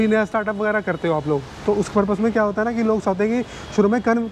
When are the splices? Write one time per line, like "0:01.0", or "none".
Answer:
none